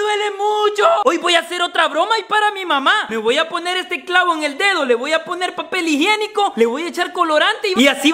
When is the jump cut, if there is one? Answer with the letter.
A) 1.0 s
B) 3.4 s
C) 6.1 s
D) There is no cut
A